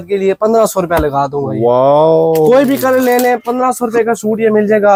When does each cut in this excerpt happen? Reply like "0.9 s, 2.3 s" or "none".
none